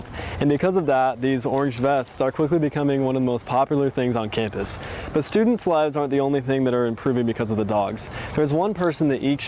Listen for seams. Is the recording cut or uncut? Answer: uncut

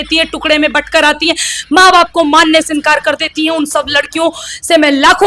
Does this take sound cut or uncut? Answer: uncut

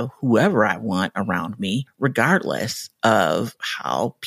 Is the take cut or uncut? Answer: cut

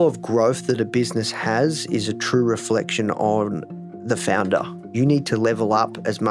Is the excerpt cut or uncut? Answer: cut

